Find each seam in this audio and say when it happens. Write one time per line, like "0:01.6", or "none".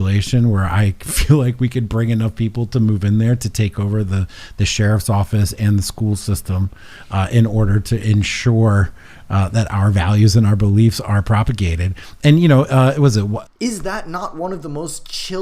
0:13.4